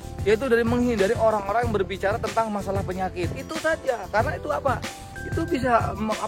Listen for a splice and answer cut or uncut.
uncut